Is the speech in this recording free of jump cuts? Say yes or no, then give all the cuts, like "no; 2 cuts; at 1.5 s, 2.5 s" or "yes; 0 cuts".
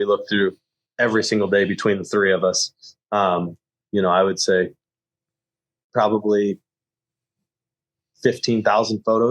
no; 1 cut; at 5.9 s